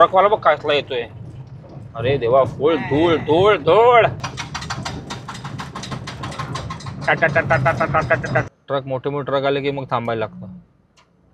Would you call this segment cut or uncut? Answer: cut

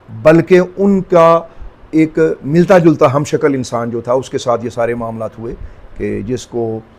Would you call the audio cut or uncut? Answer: uncut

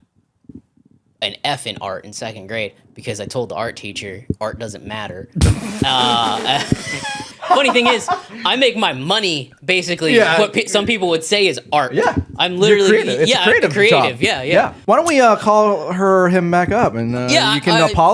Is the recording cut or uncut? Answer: cut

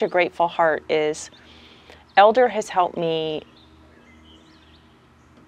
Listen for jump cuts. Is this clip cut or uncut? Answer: uncut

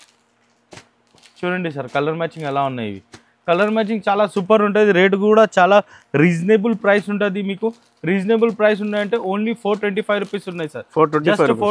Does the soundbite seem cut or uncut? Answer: uncut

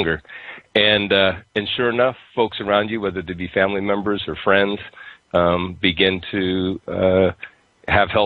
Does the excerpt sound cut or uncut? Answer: cut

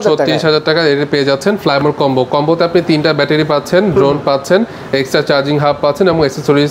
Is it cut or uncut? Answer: uncut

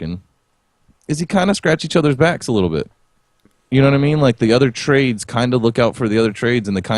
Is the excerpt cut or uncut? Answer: cut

